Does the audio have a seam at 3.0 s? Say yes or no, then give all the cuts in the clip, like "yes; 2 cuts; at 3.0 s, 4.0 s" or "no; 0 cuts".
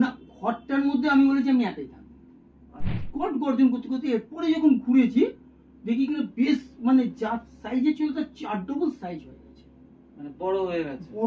yes; 1 cut; at 3.0 s